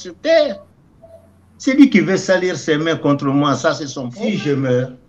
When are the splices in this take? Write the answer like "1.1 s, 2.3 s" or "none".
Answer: 4.1 s